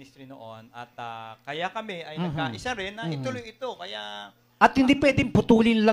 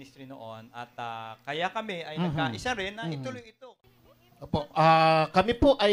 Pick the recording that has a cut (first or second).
second